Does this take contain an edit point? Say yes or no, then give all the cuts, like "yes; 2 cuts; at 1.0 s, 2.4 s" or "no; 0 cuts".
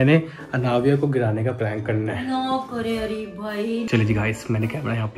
yes; 1 cut; at 3.9 s